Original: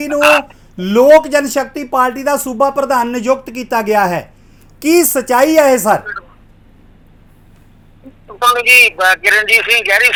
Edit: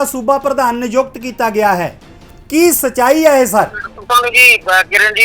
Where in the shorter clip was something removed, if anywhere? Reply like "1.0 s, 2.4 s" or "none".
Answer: 3.9 s